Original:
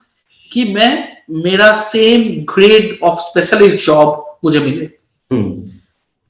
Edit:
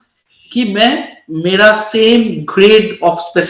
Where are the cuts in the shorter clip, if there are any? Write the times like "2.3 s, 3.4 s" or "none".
none